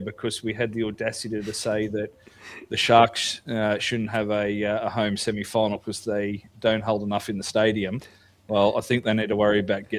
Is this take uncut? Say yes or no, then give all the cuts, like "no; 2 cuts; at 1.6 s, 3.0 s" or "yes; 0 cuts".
yes; 0 cuts